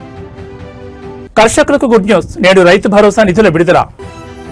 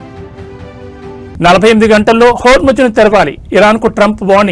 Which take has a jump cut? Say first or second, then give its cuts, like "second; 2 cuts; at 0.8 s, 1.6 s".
second; 1 cut; at 1.3 s